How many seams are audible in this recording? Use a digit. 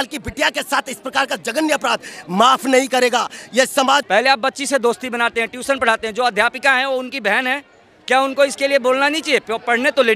1